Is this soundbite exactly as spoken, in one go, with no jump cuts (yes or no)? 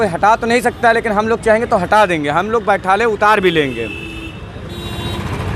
yes